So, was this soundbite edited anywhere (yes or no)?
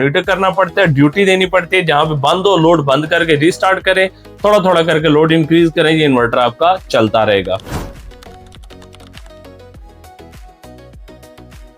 no